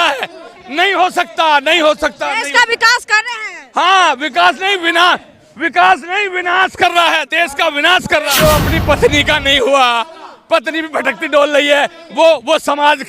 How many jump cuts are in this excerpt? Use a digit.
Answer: 1